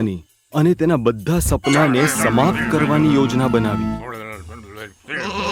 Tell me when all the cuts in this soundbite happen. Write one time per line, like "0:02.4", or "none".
none